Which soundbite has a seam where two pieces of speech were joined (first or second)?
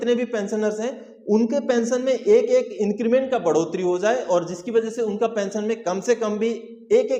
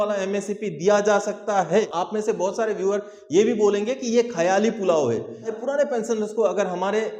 second